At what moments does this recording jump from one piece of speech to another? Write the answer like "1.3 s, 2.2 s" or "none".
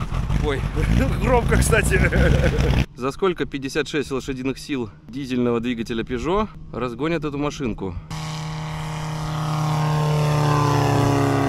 2.9 s, 5.0 s, 6.6 s, 8.1 s